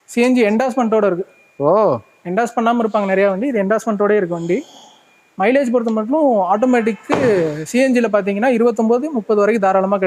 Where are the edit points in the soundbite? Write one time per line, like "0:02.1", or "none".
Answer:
none